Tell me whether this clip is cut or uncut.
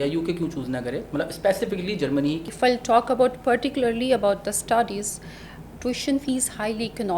cut